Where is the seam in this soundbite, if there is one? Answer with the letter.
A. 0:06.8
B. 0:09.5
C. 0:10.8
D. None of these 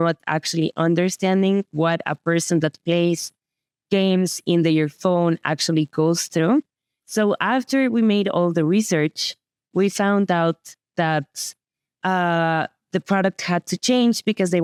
D